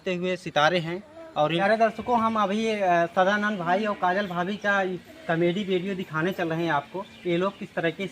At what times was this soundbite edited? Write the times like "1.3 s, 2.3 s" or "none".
1.6 s